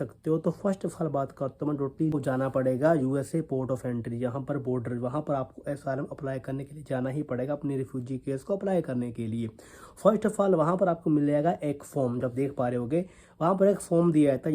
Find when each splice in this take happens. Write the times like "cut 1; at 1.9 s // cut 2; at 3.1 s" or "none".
cut 1; at 2.1 s